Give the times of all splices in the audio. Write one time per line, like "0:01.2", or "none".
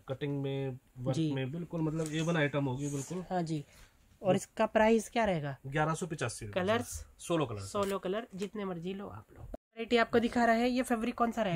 none